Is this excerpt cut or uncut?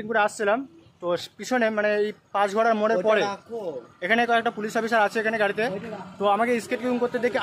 uncut